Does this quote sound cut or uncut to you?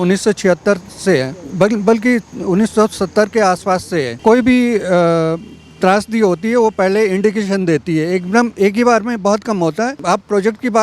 cut